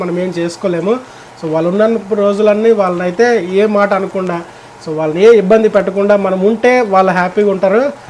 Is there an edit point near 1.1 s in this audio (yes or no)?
no